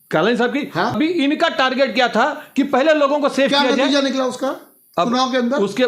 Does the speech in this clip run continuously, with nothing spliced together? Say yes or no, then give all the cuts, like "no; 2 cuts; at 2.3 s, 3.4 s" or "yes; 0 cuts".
no; 1 cut; at 1.0 s